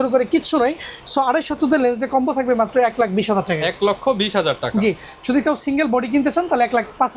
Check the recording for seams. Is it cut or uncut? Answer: uncut